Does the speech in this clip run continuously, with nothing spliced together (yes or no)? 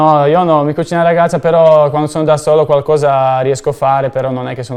yes